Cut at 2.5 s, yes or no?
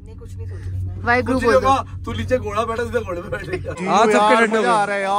no